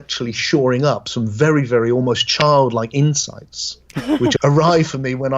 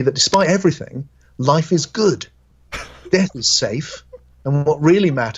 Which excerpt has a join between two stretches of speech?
first; 1 cut; at 4.3 s

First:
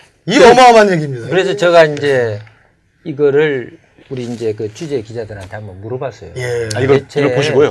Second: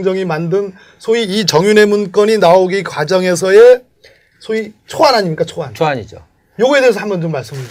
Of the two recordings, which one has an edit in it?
first; 1 cut; at 4.9 s

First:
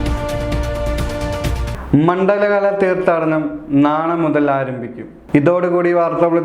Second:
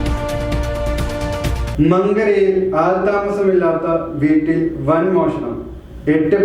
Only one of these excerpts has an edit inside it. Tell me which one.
second; 1 cut; at 1.6 s

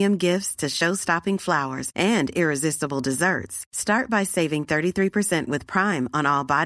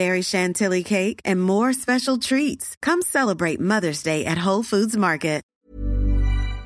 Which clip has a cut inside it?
second; 1 cut; at 5.5 s

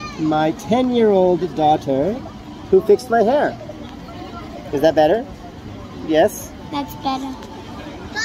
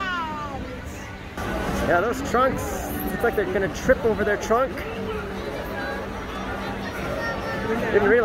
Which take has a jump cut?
second; 1 cut; at 1.4 s

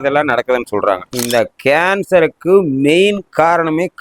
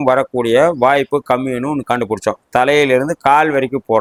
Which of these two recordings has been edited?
first; 1 cut; at 1.1 s

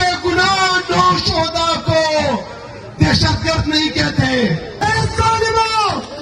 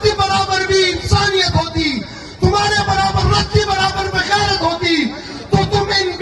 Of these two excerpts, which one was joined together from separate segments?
first; 1 cut; at 4.7 s

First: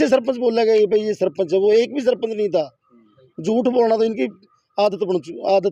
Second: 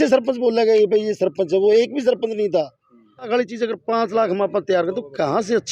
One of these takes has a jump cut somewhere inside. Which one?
second; 1 cut; at 3.3 s

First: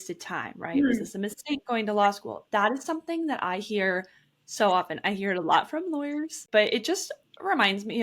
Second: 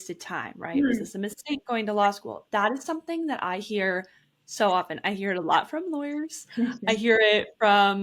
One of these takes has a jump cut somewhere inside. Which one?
first; 1 cut; at 6.4 s

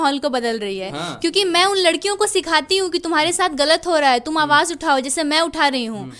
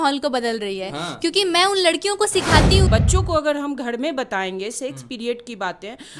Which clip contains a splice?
second; 1 cut; at 2.9 s

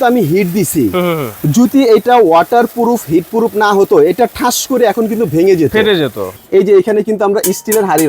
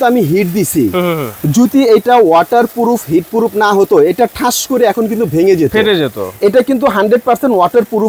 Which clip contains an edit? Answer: first; 1 cut; at 6.3 s

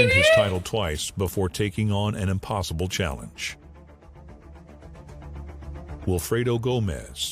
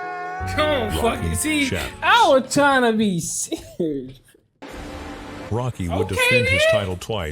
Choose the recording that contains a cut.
second; 1 cut; at 4.6 s

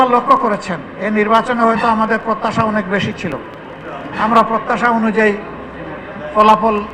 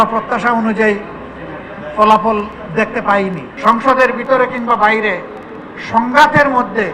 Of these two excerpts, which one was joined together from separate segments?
second; 1 cut; at 3.5 s

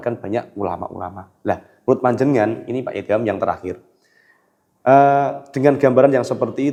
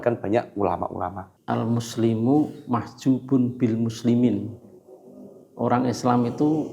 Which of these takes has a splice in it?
second; 1 cut; at 1.3 s

